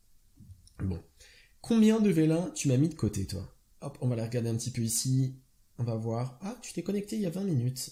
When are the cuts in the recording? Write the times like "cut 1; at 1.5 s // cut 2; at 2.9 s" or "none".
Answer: none

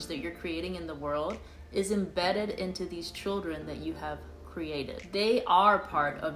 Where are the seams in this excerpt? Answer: none

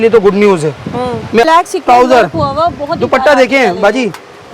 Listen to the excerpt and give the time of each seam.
cut 1; at 1.5 s

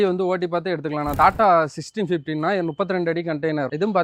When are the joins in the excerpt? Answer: cut 1; at 1.1 s

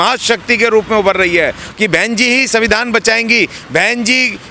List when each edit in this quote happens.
cut 1; at 1.6 s

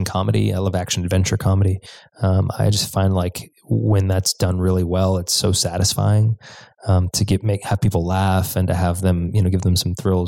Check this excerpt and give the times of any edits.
none

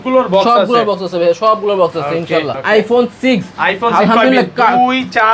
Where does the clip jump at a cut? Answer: cut 1; at 2.5 s

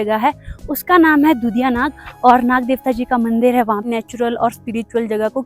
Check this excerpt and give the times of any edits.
cut 1; at 3.9 s

